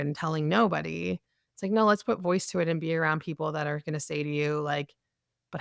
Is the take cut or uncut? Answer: uncut